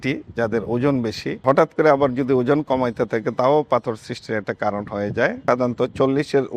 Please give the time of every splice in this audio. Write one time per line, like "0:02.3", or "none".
0:01.4
0:05.4